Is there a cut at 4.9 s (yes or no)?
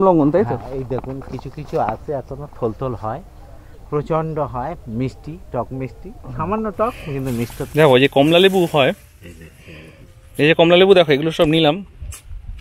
no